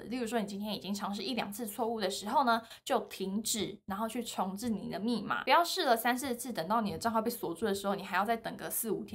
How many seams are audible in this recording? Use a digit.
1